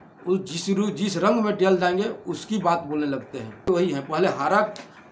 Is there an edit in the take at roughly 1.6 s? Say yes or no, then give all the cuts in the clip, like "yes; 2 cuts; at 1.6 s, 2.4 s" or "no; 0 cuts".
no; 1 cut; at 3.7 s